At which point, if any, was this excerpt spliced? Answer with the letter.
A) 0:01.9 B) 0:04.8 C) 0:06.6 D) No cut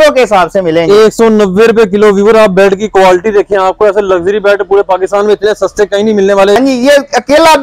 C